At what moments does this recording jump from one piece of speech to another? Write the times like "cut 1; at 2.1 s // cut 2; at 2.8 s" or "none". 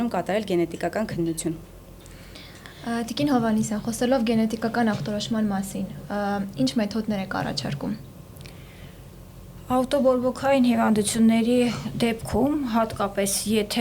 none